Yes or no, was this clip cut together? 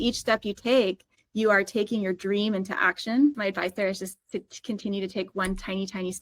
yes